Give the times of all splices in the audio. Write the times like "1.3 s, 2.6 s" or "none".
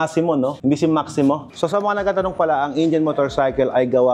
1.5 s